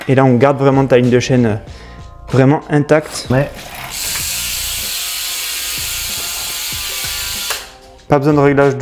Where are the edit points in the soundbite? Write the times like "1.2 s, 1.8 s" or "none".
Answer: 3.3 s